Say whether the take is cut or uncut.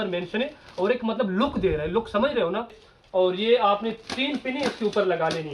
cut